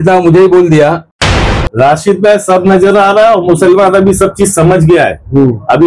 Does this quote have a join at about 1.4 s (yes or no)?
yes